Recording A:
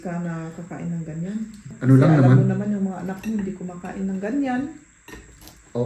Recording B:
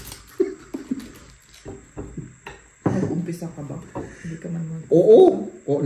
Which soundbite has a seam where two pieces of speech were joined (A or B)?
A